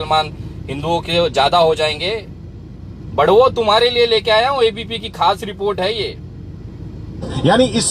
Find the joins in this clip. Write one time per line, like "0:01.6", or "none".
none